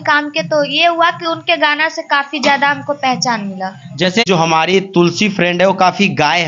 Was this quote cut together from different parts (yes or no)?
yes